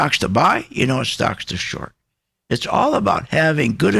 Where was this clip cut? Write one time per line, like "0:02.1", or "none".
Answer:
none